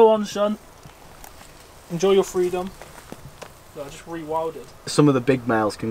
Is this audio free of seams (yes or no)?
no